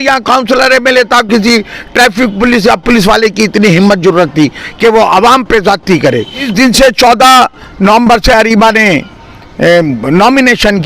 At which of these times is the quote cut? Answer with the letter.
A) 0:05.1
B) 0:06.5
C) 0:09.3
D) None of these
B